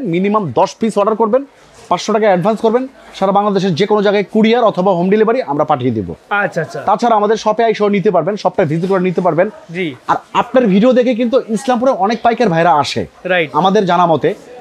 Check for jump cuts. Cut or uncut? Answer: uncut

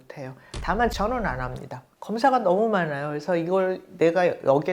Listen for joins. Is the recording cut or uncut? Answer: cut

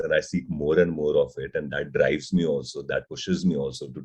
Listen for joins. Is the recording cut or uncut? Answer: uncut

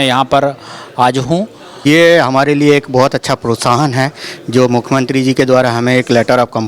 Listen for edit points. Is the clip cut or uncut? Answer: cut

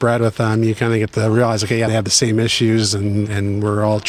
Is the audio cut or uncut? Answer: cut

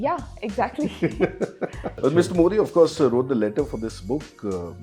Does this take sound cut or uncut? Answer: cut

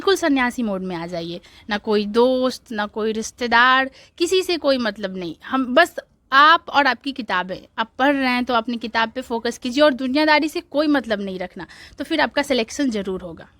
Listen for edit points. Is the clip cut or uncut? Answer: uncut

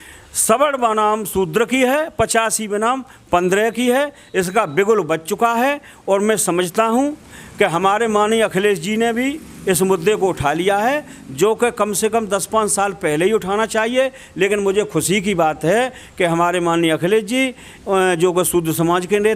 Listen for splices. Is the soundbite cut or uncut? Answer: uncut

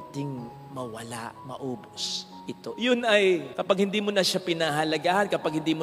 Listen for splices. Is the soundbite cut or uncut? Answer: uncut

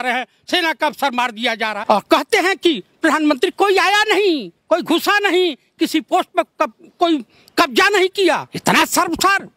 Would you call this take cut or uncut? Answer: cut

